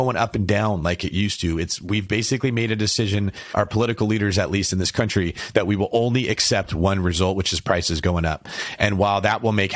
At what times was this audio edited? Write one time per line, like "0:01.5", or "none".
0:03.4